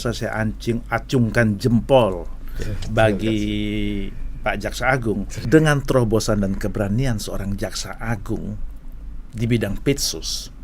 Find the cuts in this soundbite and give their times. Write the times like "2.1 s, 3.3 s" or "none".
5.3 s